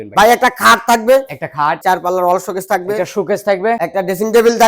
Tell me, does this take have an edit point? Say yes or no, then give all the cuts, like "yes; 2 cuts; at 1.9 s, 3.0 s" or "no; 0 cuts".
yes; 2 cuts; at 1.8 s, 3.8 s